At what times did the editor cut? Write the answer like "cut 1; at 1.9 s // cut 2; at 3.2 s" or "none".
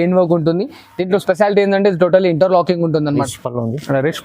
cut 1; at 3.2 s